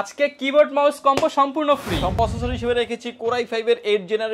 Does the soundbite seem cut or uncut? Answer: cut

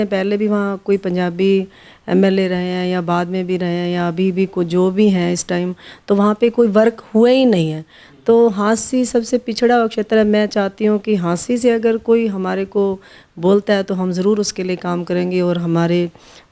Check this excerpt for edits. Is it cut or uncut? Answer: uncut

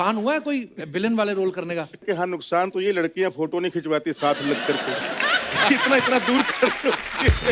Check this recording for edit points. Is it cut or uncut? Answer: cut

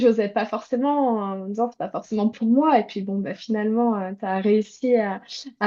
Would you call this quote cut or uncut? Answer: uncut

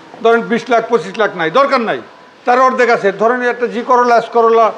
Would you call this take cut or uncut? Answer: uncut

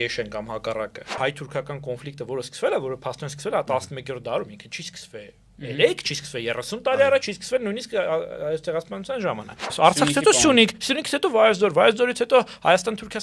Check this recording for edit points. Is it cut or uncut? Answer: cut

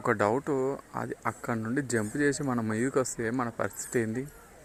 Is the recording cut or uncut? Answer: uncut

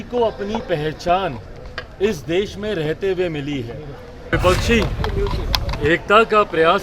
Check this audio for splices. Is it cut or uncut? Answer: cut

